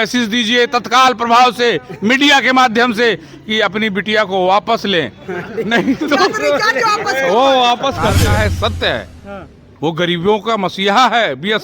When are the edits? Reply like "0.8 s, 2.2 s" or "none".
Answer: 8.2 s